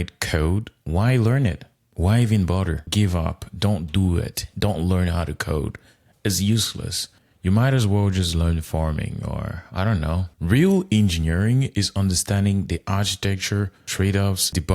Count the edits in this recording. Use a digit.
2